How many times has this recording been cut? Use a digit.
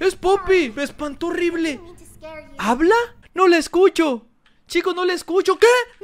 1